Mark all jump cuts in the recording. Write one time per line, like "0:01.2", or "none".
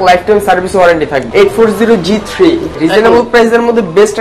0:01.2
0:02.7

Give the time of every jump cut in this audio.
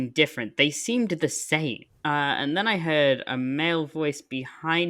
0:01.9

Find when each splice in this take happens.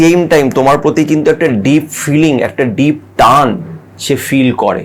none

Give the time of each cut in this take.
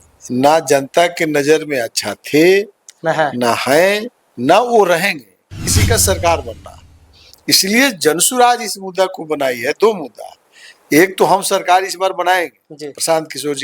0:05.7

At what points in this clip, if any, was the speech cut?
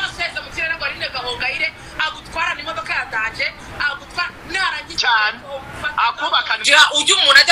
0:06.5

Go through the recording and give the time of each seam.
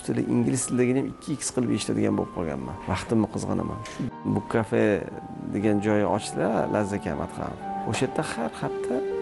0:02.7
0:04.3
0:07.7

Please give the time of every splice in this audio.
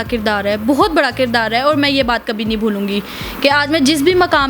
none

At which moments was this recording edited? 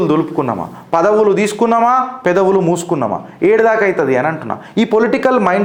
none

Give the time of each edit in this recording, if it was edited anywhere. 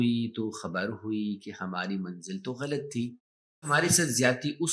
0:03.7

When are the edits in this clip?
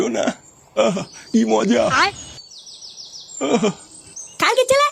0:01.1

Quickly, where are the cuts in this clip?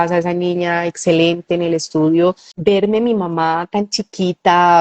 0:02.5

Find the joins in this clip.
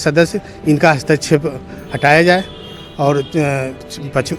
none

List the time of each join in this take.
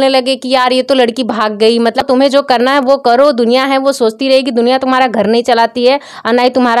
0:02.0

